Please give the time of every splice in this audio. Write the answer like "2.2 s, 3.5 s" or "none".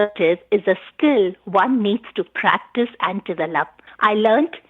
3.8 s